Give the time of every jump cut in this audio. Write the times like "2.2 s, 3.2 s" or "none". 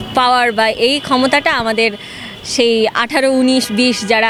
none